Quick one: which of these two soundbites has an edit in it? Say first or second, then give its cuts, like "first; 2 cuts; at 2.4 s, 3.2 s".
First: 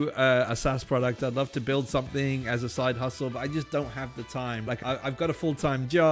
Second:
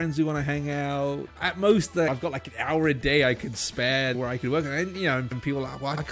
second; 1 cut; at 4.2 s